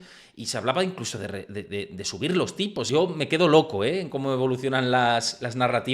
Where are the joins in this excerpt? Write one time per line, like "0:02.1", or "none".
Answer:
0:02.9